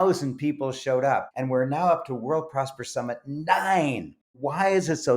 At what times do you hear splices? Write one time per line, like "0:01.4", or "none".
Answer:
0:01.3
0:04.3